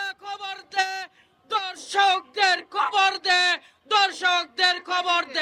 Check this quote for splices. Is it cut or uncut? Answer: uncut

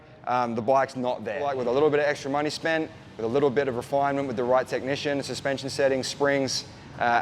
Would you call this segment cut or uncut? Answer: cut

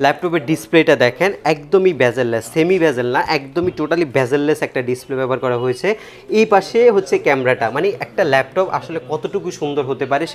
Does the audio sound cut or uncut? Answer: uncut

